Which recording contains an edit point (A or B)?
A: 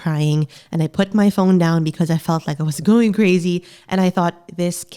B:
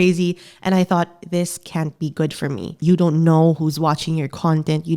B